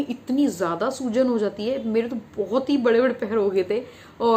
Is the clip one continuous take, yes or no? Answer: yes